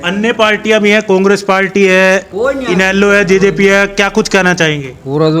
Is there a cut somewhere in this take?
no; 0 cuts

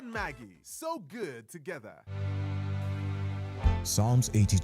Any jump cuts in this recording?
yes; 1 cut; at 2.0 s

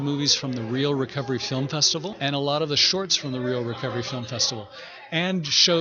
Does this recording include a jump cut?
yes; 1 cut; at 2.1 s

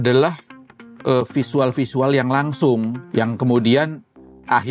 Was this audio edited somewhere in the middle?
yes; 1 cut; at 3.0 s

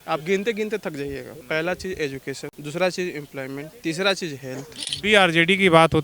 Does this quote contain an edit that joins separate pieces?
yes; 4 cuts; at 1.3 s, 2.5 s, 3.7 s, 4.8 s

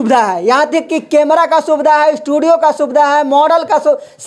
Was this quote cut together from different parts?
no; 0 cuts

